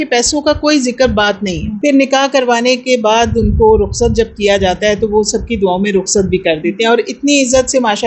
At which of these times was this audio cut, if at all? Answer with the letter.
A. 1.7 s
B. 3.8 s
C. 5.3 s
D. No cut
A